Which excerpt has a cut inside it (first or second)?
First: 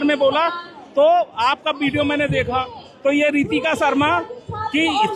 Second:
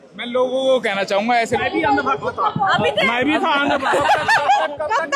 second